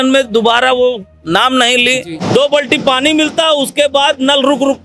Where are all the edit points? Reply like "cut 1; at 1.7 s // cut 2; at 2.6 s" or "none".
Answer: cut 1; at 2.1 s